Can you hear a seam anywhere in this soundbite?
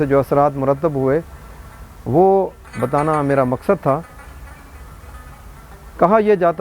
no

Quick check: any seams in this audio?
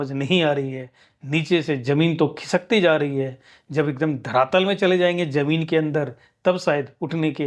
no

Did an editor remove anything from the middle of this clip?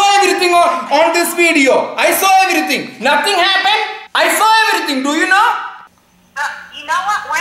no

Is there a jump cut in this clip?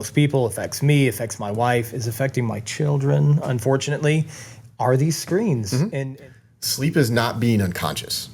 yes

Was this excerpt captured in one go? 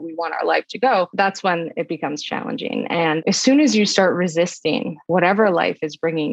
no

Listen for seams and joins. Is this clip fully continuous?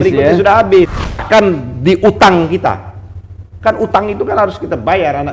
no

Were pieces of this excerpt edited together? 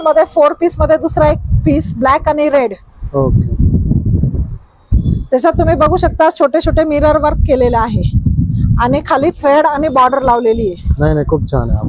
no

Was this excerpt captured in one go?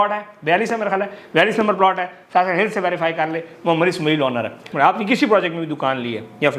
no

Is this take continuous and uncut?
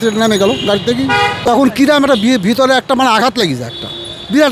no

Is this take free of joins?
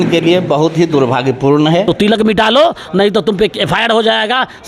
no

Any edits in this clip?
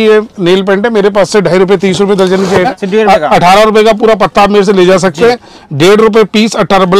yes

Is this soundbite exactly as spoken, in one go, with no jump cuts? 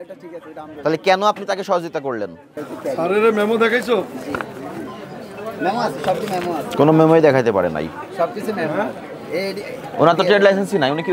yes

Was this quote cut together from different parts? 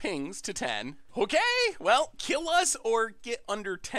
yes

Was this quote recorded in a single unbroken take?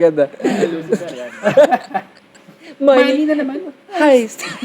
no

